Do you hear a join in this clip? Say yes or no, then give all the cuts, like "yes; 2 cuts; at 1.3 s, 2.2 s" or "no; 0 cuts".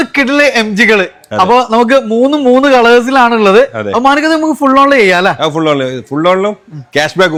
no; 0 cuts